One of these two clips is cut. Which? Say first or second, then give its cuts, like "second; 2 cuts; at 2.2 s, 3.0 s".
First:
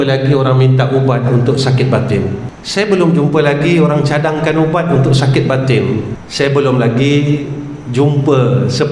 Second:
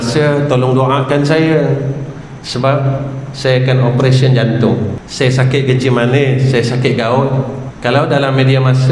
second; 2 cuts; at 5.0 s, 7.6 s